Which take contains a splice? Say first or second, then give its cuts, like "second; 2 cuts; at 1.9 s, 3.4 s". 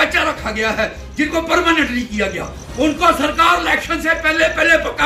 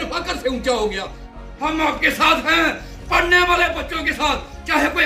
second; 1 cut; at 1.4 s